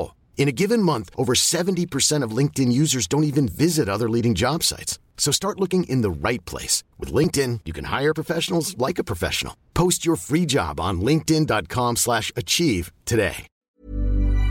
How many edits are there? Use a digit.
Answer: 1